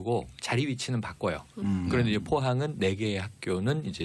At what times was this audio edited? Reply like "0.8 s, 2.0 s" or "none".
2.5 s